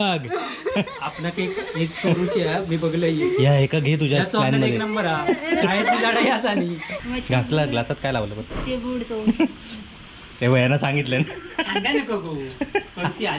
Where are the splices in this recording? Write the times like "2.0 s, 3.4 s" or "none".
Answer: 6.9 s